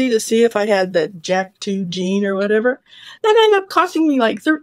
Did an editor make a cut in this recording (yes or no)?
no